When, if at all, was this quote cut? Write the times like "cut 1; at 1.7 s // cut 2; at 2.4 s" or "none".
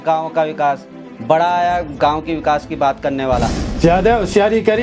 cut 1; at 3.6 s